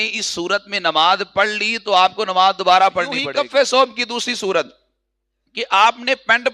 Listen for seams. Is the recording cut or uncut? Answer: cut